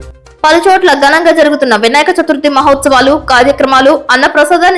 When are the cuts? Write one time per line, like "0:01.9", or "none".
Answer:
none